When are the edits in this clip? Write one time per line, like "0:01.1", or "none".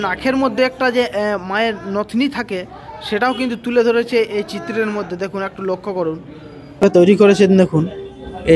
0:06.8